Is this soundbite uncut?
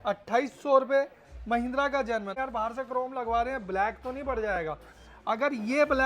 no; 1 cut; at 2.4 s

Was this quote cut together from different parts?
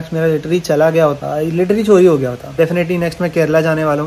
yes; 2 cuts; at 1.2 s, 2.5 s

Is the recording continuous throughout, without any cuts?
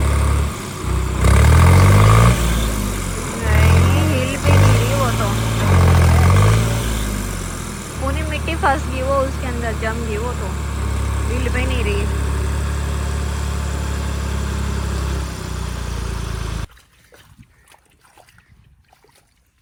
yes; 0 cuts

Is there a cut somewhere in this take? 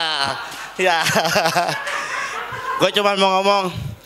no; 0 cuts

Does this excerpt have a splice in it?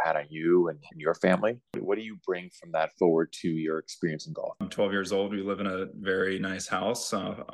yes; 2 cuts; at 1.8 s, 4.6 s

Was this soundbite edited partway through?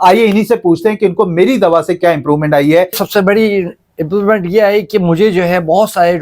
yes; 1 cut; at 3.0 s

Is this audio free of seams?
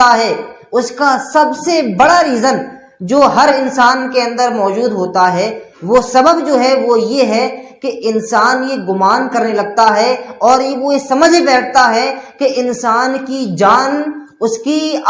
yes; 0 cuts

